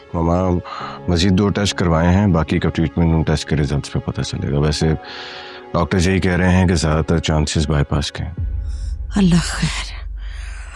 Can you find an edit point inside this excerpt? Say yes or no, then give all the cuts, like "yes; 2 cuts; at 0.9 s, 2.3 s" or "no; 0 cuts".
no; 0 cuts